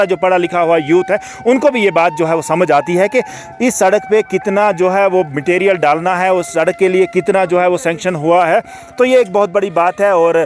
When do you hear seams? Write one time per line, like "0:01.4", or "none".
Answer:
none